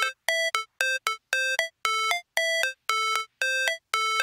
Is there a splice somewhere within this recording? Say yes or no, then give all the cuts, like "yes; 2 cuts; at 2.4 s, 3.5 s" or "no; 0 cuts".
no; 0 cuts